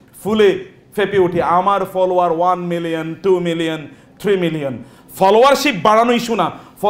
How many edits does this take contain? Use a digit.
0